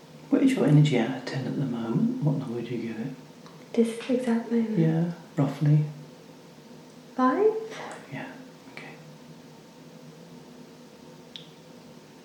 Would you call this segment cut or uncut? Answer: uncut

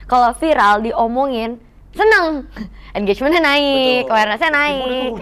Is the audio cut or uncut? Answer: uncut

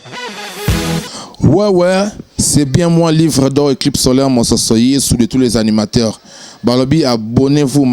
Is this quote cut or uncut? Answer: cut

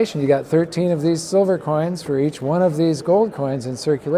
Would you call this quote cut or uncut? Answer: uncut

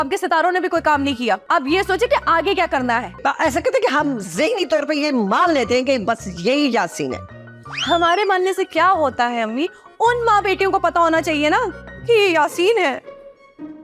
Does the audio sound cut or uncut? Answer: uncut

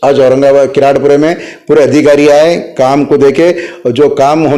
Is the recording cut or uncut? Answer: uncut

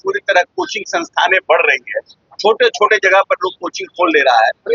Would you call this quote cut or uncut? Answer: uncut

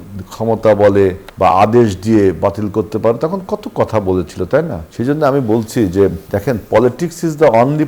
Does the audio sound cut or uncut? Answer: cut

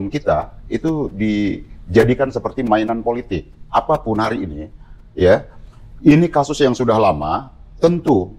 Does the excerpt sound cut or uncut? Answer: uncut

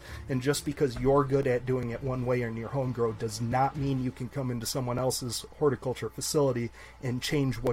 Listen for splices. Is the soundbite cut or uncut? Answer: uncut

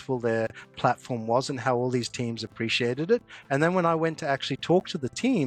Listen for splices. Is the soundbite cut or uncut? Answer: uncut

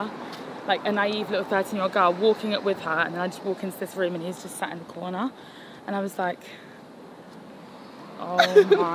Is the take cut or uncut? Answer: uncut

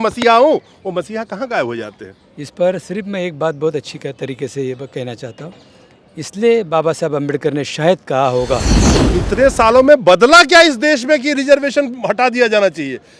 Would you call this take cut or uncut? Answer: cut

